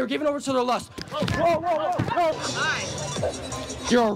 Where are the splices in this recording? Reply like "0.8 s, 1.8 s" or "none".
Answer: 2.3 s